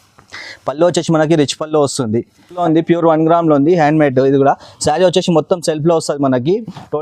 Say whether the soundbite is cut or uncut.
cut